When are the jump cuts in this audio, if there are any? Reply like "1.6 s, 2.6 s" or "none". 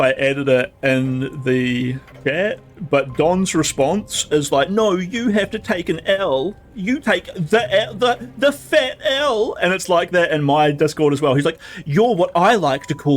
2.1 s